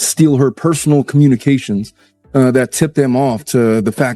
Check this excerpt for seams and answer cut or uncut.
uncut